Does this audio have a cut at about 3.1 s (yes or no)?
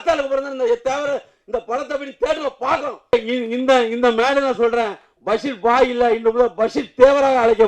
yes